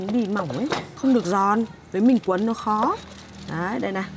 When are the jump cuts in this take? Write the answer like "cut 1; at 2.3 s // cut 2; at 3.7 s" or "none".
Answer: cut 1; at 1.0 s // cut 2; at 1.8 s